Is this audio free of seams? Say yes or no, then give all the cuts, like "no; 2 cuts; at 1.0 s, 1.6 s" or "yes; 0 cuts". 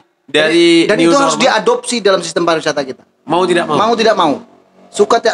yes; 0 cuts